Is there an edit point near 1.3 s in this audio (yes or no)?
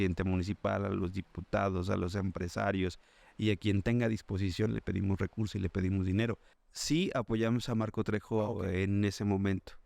no